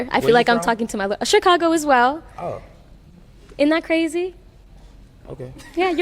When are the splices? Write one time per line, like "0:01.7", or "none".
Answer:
0:04.1